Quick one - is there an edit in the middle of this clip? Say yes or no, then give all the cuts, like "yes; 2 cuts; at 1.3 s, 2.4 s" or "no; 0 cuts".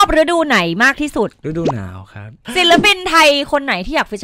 yes; 1 cut; at 2.4 s